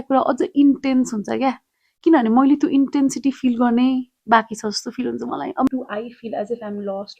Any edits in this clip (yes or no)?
yes